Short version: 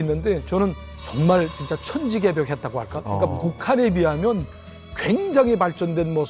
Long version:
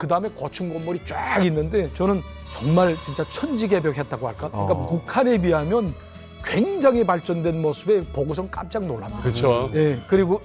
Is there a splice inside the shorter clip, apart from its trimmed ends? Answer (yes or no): no